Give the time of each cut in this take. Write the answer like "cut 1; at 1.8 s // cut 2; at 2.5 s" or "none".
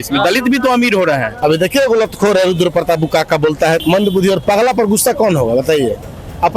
cut 1; at 1.3 s // cut 2; at 3.8 s